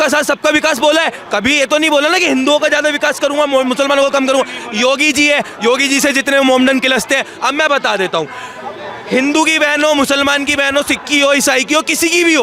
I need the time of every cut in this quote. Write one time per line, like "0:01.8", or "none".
none

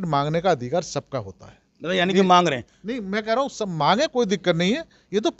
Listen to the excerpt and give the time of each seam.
none

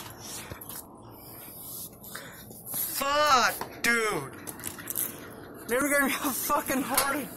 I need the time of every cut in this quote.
0:05.8

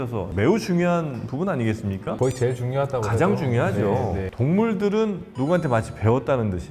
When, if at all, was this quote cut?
0:02.1
0:04.3
0:05.3

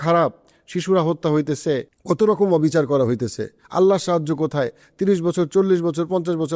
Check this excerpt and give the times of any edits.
0:01.9

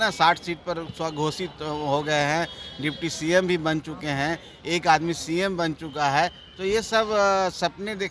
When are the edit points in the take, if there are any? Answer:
none

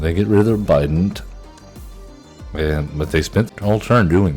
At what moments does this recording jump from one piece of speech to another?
0:03.5

